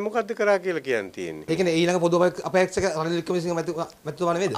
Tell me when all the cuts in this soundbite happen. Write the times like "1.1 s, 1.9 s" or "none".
1.4 s